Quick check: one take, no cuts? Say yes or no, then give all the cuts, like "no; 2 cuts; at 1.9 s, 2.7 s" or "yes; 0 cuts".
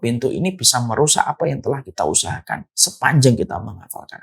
no; 1 cut; at 3.0 s